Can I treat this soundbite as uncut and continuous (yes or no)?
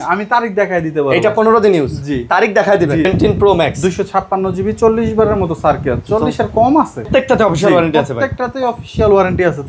no